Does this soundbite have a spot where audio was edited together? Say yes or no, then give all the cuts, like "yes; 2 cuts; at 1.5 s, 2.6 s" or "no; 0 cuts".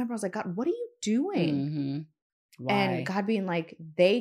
no; 0 cuts